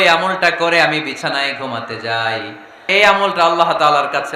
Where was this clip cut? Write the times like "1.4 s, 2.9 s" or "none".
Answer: 2.9 s